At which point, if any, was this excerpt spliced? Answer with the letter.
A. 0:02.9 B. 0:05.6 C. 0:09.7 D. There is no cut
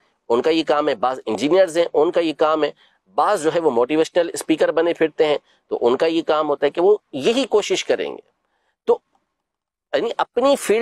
D